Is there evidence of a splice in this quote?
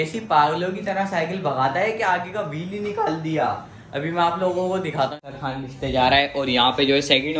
yes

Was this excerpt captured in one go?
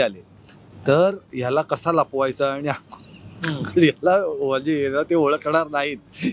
yes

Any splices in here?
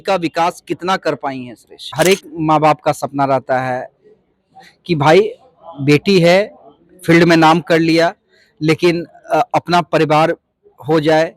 yes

